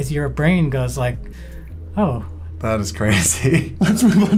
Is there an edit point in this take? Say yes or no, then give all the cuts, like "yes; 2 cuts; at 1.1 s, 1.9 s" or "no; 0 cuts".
no; 0 cuts